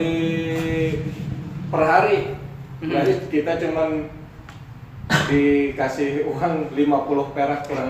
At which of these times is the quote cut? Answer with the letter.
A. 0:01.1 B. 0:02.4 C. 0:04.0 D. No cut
D